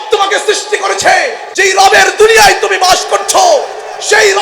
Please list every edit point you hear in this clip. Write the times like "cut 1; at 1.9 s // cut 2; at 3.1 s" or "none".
cut 1; at 1.4 s